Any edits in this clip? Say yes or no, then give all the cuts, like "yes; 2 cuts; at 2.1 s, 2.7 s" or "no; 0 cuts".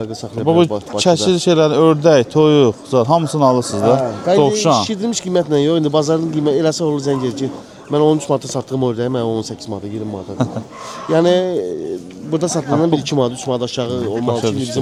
no; 0 cuts